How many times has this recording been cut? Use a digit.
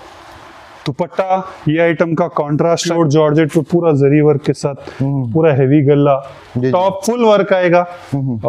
1